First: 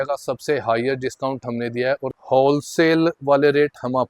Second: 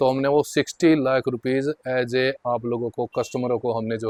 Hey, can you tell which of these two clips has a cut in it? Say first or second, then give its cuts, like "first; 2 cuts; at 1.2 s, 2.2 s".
first; 1 cut; at 2.2 s